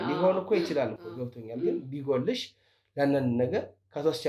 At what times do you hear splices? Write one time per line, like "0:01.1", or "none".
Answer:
none